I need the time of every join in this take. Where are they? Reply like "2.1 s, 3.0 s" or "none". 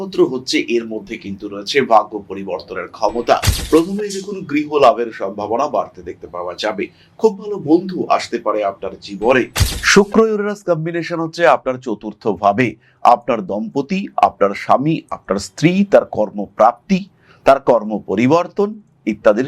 3.5 s, 9.6 s